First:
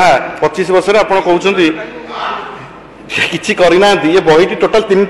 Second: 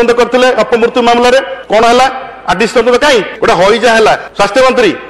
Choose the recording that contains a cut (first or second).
second